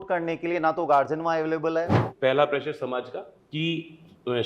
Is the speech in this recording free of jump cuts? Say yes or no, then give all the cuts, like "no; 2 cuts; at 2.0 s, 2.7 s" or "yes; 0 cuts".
no; 2 cuts; at 2.0 s, 3.4 s